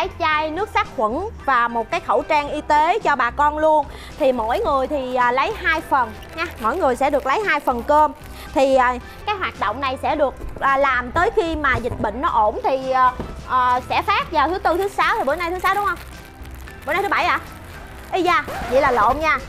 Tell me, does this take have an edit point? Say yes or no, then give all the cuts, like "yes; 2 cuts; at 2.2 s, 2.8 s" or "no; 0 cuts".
yes; 1 cut; at 9.2 s